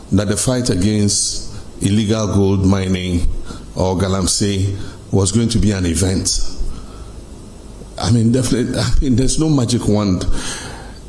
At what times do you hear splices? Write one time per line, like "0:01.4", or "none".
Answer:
none

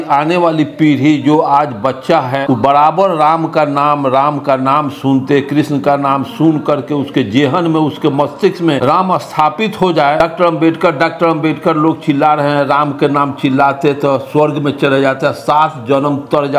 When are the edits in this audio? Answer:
0:02.4
0:08.8
0:10.2

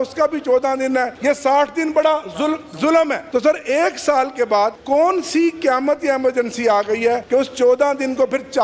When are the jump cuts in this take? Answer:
0:01.1
0:03.2
0:04.8
0:07.2

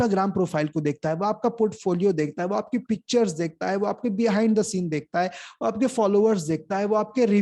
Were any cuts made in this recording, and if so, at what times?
none

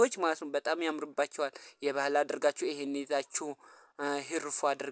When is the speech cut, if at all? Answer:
none

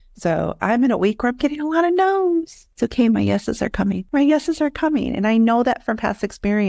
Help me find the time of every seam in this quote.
0:02.6
0:04.0

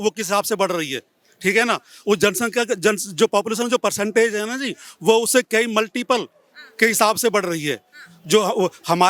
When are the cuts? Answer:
none

